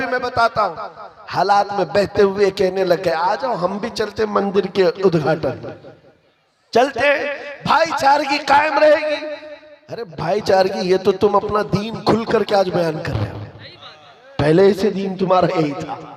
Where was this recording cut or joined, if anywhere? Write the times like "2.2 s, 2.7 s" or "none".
none